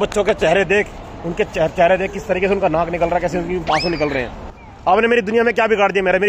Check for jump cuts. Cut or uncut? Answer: cut